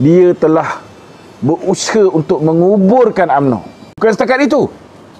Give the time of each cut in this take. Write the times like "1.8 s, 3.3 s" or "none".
4.0 s